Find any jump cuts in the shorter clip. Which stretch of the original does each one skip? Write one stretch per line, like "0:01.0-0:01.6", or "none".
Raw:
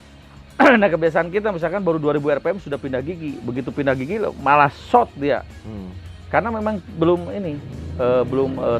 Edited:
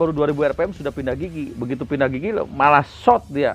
none

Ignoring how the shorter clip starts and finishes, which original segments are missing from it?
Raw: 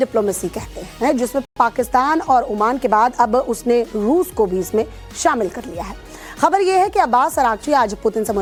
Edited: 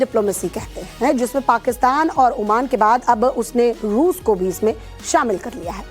0:01.4-0:01.5

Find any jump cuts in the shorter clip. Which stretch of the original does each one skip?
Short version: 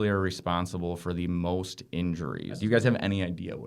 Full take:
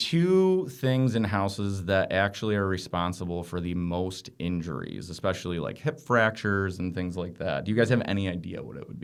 0:05.0-0:07.6

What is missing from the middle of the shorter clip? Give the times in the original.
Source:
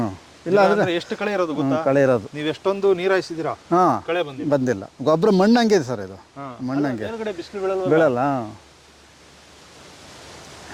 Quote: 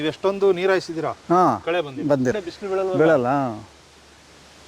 0:04.9-0:07.4

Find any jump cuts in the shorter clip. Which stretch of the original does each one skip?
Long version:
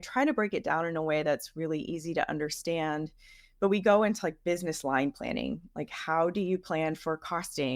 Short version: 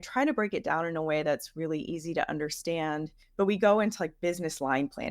0:03.2-0:03.4

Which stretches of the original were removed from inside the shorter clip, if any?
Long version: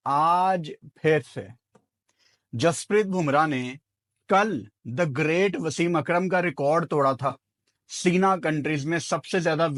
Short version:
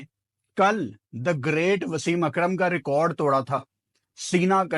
none

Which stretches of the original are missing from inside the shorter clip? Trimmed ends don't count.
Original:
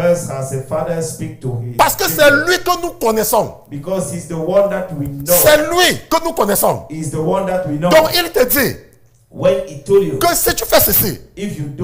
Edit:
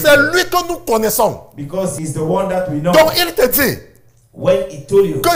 0:04.2-0:07.0

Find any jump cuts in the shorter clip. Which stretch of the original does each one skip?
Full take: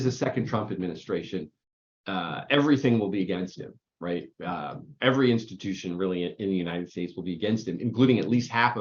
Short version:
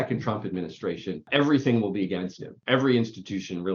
0:01.5-0:02.4
0:03.7-0:04.8

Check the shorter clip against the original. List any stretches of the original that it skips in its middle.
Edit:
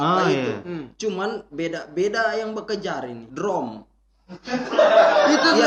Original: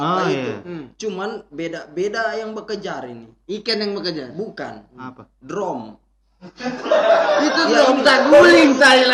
0:03.2-0:05.3

